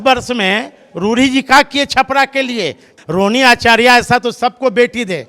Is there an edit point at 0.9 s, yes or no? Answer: no